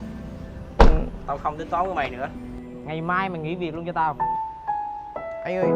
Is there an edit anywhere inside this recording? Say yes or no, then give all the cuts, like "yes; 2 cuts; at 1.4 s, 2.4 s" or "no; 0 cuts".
yes; 1 cut; at 4.2 s